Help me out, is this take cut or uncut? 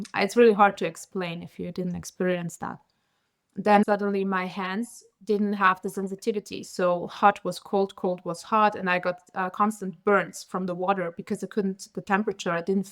cut